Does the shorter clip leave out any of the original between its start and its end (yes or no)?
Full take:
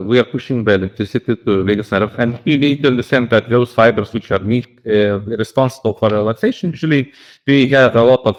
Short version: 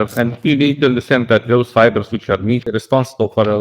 yes